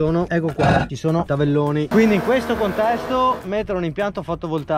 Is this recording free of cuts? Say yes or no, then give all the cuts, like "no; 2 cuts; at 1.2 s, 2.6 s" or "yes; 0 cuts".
yes; 0 cuts